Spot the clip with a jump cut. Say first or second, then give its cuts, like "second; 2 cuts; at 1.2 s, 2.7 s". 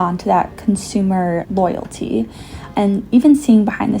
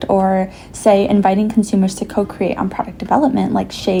first; 2 cuts; at 1.5 s, 2.5 s